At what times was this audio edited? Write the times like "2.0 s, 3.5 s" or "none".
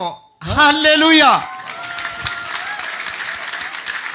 none